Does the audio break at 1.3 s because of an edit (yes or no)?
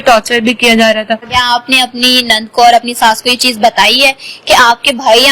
yes